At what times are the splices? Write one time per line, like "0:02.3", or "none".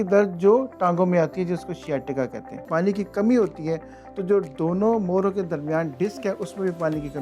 0:02.6